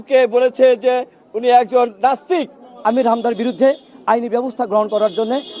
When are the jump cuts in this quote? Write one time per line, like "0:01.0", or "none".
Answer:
0:02.7